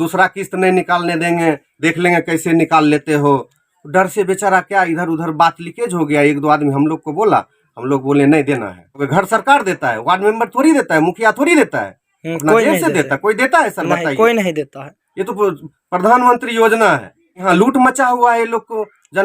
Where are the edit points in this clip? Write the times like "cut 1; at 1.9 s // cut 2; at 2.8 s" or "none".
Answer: cut 1; at 9.0 s // cut 2; at 17.5 s